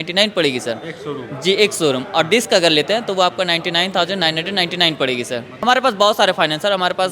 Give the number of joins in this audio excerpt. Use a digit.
1